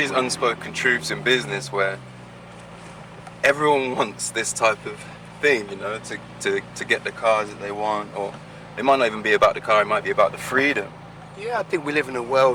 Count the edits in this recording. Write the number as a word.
zero